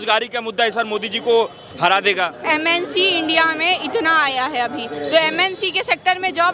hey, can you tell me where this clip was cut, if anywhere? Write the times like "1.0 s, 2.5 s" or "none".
2.5 s